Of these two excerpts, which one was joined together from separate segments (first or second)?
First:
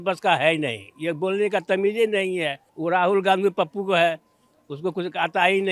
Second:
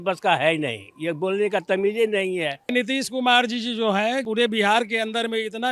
second